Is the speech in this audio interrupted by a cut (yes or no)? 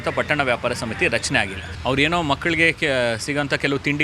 yes